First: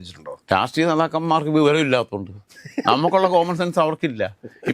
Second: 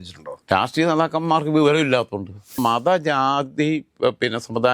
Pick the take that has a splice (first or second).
second